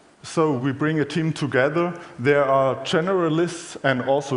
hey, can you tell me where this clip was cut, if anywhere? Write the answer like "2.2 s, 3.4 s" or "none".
2.1 s